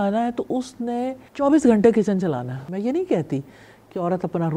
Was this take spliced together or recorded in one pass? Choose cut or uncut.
cut